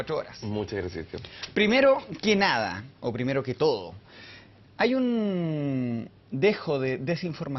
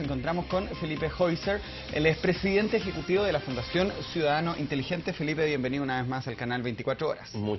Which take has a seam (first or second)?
first